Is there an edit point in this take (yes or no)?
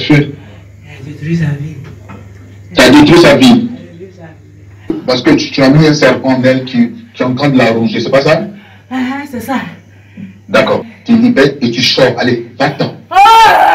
yes